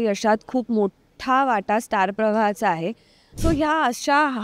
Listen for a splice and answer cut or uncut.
cut